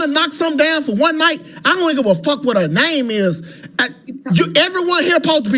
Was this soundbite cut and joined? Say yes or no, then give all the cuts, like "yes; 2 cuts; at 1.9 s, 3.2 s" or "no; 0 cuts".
no; 0 cuts